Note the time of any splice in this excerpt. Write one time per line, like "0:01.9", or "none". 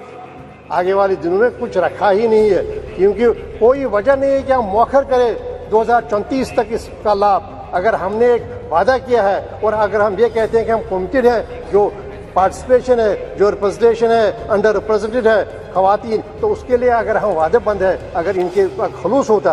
none